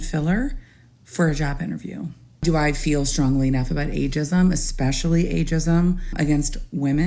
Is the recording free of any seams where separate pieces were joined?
no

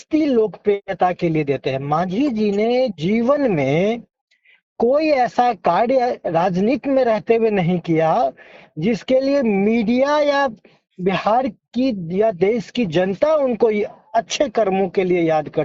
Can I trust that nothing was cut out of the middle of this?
yes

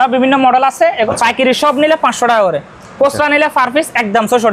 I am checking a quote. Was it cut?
yes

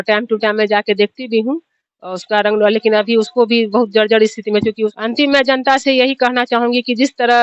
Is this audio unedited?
no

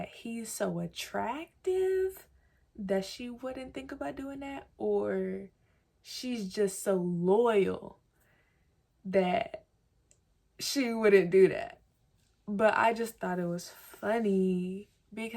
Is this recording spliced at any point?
no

